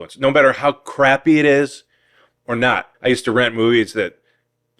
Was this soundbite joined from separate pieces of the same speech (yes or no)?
yes